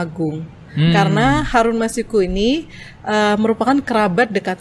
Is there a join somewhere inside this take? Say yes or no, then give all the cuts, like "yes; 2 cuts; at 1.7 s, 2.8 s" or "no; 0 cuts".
no; 0 cuts